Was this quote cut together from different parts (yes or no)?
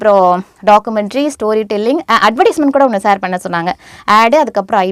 no